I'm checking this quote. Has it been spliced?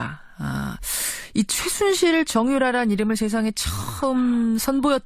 yes; 1 cut; at 1.2 s

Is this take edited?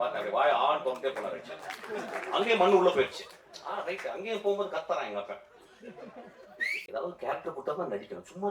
yes; 1 cut; at 6.8 s

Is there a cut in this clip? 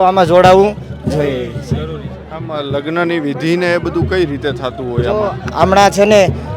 no; 0 cuts

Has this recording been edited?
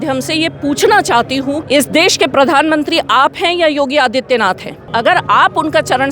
yes; 2 cuts; at 1.6 s, 4.9 s

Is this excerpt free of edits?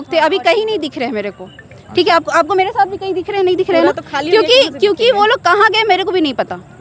yes; 0 cuts

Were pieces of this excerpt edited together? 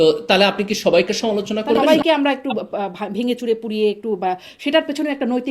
yes; 1 cut; at 1.8 s

